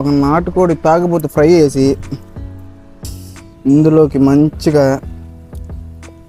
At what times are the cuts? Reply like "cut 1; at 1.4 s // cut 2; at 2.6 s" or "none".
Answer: none